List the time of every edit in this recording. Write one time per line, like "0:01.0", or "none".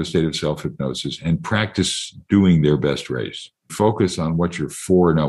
0:03.7